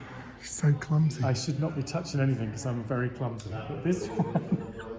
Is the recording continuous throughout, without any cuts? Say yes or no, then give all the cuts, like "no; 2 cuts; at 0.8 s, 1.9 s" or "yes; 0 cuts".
yes; 0 cuts